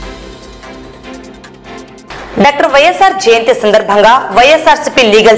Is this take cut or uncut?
cut